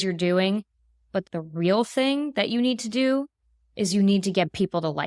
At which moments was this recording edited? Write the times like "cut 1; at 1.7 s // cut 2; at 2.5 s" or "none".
cut 1; at 1.2 s